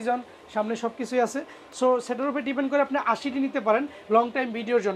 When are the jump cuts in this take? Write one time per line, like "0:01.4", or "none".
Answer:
none